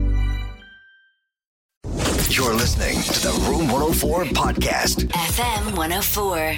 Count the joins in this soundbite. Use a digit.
1